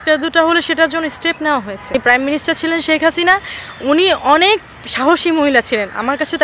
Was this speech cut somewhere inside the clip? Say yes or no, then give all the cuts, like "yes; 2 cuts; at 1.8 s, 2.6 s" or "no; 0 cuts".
yes; 1 cut; at 1.9 s